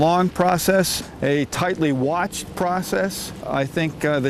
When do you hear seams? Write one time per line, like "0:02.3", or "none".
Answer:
0:01.0
0:03.4